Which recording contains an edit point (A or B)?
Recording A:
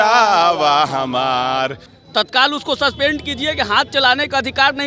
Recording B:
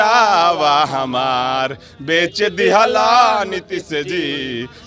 A